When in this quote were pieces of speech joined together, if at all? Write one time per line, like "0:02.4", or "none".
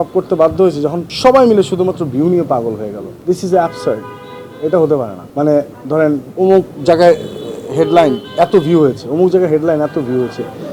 0:01.1
0:03.1
0:05.2
0:06.3